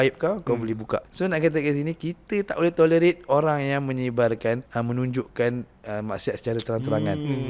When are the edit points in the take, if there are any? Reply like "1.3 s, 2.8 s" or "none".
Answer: 1.1 s, 4.7 s